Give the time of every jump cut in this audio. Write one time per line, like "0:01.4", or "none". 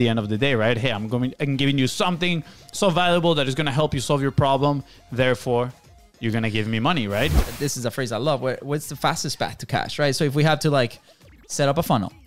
0:07.4